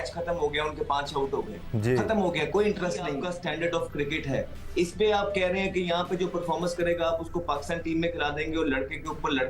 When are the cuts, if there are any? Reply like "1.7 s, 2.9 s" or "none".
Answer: 3.2 s